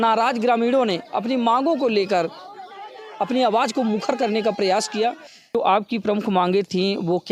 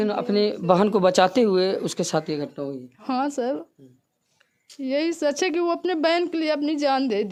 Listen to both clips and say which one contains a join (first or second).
first